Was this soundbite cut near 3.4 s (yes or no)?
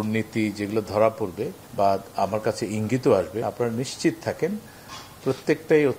yes